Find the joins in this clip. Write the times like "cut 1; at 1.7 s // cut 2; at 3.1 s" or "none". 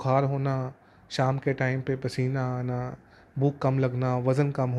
none